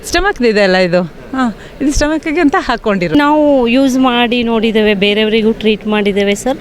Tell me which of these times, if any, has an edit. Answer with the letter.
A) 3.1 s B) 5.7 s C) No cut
A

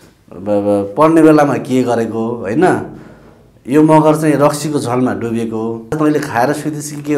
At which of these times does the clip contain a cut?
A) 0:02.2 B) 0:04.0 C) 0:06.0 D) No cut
C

